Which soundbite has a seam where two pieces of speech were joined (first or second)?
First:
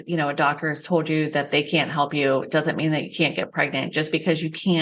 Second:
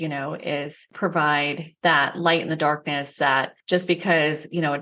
second